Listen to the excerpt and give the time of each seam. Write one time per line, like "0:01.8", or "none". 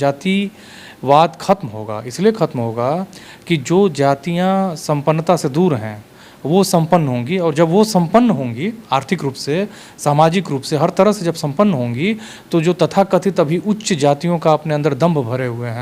none